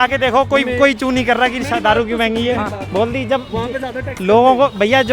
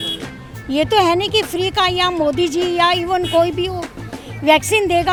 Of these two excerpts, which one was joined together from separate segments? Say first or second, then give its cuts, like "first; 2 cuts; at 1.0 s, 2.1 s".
first; 1 cut; at 2.8 s